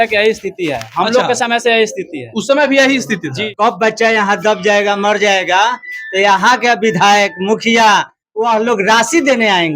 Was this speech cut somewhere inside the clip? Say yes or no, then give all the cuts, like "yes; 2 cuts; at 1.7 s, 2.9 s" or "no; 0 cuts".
yes; 1 cut; at 3.4 s